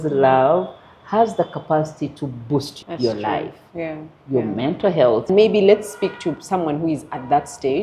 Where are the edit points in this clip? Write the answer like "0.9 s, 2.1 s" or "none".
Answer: 2.7 s, 5.3 s